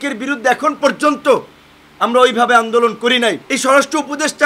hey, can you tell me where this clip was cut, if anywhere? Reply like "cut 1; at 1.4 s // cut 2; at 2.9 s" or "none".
cut 1; at 3.5 s

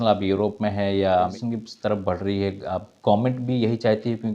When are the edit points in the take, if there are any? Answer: cut 1; at 1.3 s

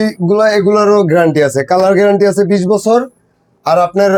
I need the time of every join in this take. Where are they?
none

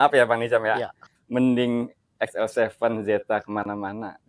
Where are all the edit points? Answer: cut 1; at 1.1 s

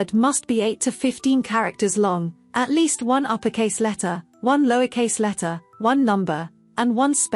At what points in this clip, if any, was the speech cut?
none

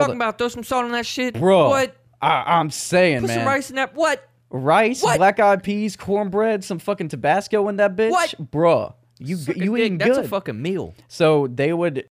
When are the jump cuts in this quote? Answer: none

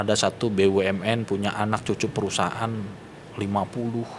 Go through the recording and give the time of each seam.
none

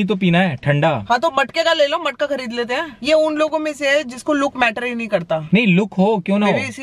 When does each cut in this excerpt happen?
cut 1; at 1.0 s // cut 2; at 2.9 s // cut 3; at 5.4 s

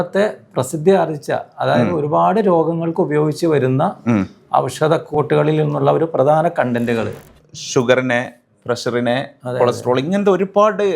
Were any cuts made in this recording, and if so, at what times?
cut 1; at 5.1 s // cut 2; at 7.2 s

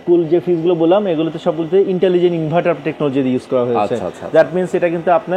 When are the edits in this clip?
none

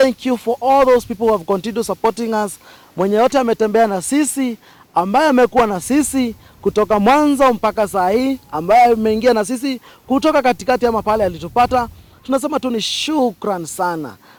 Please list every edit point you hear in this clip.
none

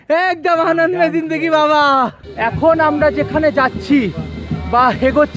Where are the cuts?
cut 1; at 2.2 s

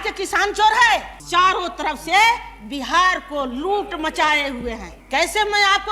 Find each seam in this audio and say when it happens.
cut 1; at 1.2 s // cut 2; at 4.9 s

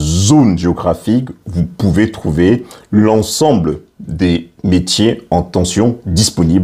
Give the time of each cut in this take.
none

